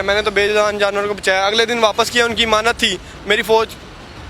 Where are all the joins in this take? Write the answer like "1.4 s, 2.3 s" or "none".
none